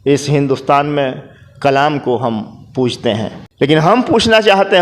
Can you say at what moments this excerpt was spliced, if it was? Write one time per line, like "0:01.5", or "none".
0:03.4